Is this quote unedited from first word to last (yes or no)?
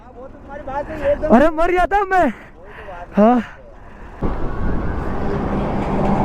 no